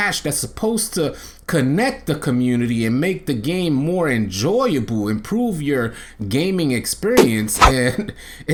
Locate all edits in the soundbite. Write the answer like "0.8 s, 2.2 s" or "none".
none